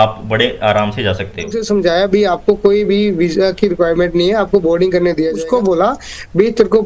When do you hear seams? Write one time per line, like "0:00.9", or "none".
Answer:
0:01.6
0:05.4